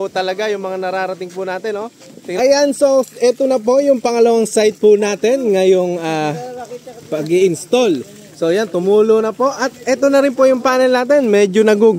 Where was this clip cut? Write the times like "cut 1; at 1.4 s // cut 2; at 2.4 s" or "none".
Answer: cut 1; at 2.4 s